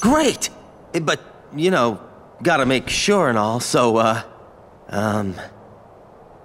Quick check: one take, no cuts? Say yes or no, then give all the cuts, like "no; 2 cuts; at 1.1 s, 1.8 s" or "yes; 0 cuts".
no; 1 cut; at 5.5 s